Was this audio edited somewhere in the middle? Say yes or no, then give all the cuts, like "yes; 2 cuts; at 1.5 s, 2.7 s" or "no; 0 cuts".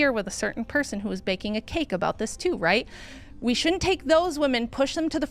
no; 0 cuts